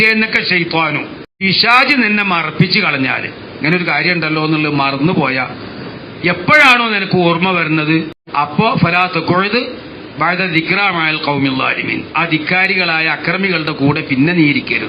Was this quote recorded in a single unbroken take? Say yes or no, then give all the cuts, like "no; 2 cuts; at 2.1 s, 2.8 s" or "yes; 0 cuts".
no; 2 cuts; at 1.4 s, 8.5 s